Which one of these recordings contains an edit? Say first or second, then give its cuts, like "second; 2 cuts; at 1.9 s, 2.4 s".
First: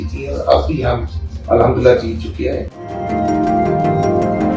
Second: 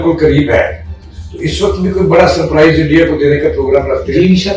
first; 1 cut; at 2.8 s